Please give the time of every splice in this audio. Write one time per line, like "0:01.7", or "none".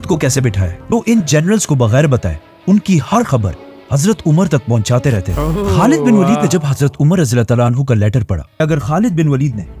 0:00.9
0:08.6